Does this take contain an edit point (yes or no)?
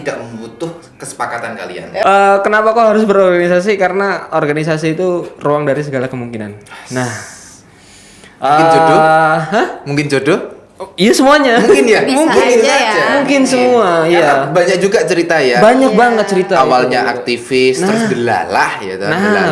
yes